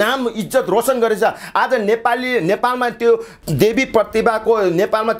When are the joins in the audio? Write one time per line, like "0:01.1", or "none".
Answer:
0:03.3